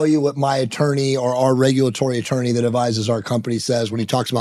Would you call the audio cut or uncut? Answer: uncut